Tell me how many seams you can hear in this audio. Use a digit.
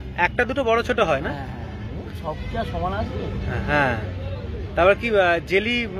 0